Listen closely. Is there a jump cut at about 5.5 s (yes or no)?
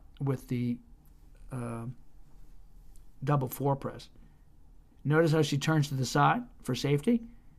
yes